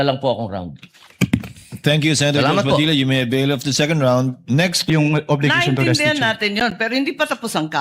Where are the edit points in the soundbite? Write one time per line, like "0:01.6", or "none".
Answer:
0:04.9